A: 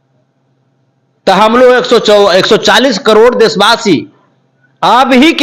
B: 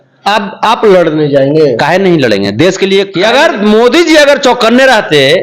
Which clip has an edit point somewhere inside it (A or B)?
B